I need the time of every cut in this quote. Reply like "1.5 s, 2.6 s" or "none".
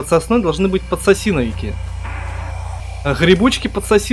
2.8 s